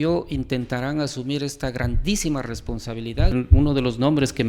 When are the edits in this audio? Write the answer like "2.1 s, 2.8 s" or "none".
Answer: 3.3 s

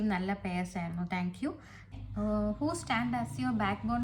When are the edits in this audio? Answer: 1.9 s

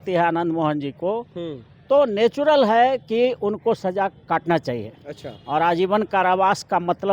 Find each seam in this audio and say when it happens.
none

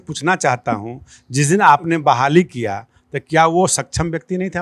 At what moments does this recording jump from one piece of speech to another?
none

